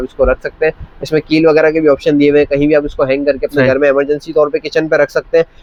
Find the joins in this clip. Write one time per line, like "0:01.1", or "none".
none